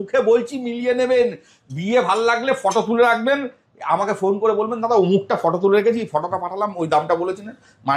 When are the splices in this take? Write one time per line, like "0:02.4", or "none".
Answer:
none